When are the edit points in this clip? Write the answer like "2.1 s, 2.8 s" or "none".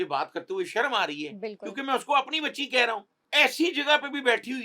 3.1 s